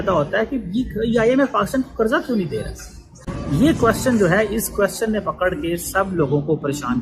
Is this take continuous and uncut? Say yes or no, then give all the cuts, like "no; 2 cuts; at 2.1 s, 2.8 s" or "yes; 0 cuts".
yes; 0 cuts